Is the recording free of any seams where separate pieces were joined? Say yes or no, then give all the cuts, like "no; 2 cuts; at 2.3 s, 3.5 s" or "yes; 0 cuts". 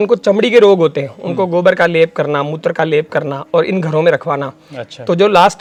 yes; 0 cuts